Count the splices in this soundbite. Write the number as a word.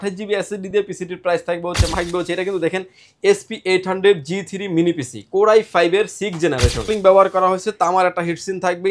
two